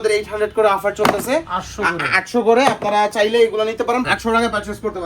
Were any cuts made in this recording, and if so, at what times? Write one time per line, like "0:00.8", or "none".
0:04.0